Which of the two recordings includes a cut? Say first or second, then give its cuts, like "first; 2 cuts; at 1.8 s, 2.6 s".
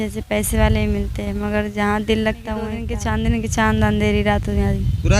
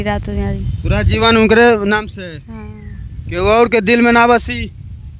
first; 1 cut; at 2.9 s